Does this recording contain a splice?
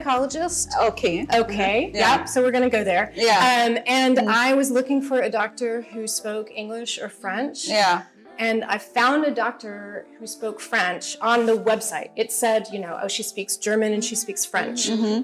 no; 0 cuts

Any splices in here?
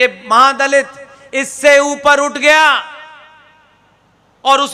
no; 0 cuts

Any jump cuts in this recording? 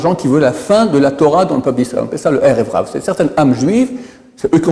no; 0 cuts

